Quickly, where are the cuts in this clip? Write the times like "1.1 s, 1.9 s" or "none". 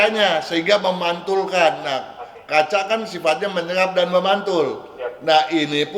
none